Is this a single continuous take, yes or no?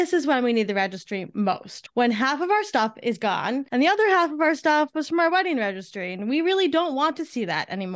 no